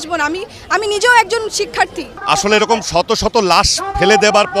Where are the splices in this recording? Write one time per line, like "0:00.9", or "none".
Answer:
0:02.1